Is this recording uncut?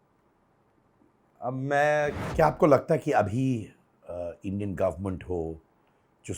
no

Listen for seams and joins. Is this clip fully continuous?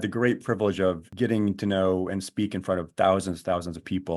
no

